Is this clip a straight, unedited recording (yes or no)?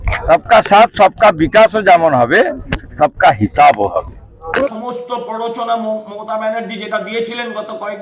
no